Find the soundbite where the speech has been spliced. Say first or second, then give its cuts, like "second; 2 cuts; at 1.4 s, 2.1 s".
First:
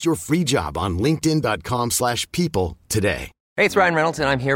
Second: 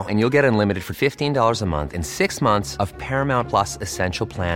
first; 1 cut; at 3.4 s